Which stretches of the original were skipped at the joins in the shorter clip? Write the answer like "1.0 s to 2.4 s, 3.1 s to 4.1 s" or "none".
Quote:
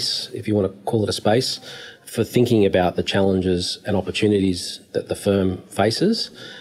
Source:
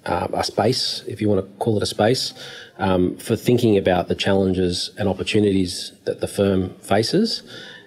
2.8 s to 3.2 s

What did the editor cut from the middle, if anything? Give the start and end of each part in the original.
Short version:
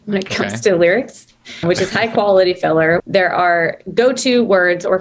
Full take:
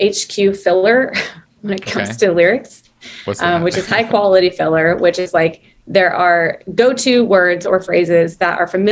3.2 s to 3.6 s, 5.0 s to 5.8 s

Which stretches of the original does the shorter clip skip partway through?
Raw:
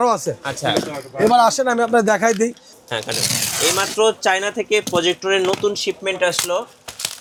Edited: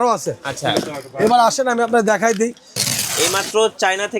2.8 s to 3.2 s

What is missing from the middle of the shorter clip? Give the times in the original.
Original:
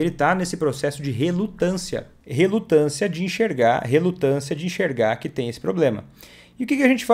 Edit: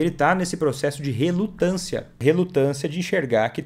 2.2 s to 3.8 s

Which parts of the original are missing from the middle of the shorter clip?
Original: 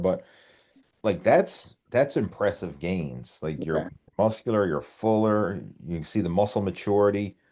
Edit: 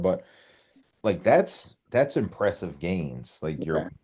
none

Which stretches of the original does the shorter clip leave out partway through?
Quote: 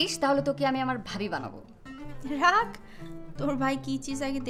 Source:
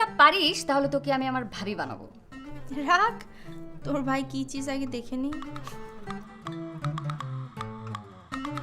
none

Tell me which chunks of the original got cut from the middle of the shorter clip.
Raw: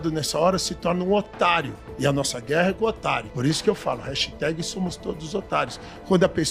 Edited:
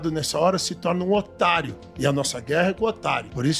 none

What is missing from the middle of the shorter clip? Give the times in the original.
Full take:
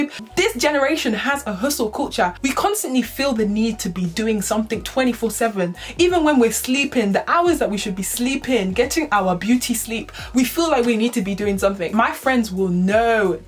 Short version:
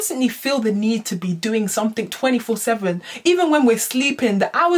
none

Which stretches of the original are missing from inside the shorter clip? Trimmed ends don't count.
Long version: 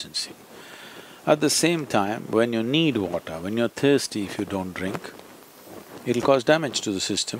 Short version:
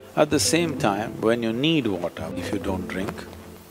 3.5 s to 4.2 s

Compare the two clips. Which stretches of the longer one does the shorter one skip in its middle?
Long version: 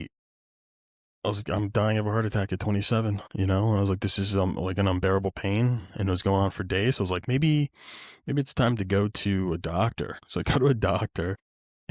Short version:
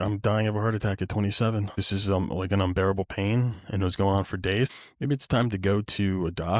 3.3 s to 4.0 s, 7.0 s to 8.0 s

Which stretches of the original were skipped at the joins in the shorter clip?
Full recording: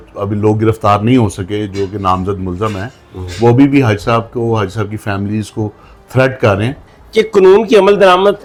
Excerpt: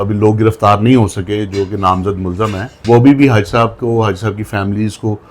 2.9 s to 3.2 s

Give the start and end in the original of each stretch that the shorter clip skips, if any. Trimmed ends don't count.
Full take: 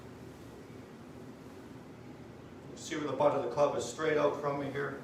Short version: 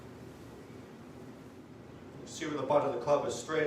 1.7 s to 2.2 s

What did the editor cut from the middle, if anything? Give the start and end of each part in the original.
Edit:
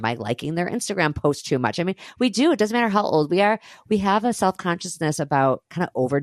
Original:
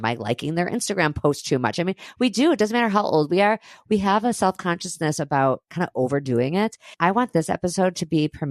none

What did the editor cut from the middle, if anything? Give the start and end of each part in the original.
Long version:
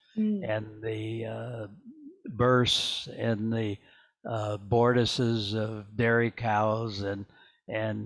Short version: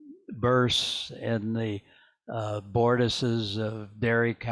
none

